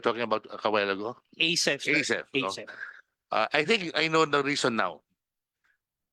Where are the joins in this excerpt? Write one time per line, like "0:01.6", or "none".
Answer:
none

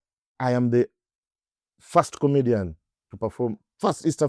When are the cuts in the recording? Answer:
none

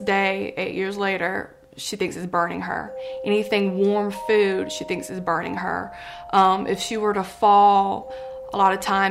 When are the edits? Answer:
none

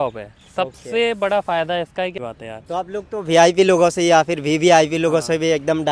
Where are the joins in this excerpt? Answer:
0:02.1

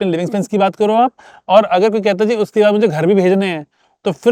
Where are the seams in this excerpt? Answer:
none

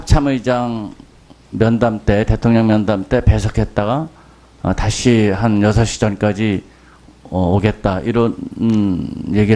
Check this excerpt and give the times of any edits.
0:01.2

